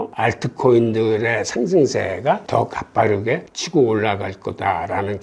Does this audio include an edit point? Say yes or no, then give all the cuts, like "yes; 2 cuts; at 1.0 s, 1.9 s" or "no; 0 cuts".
yes; 2 cuts; at 2.4 s, 3.5 s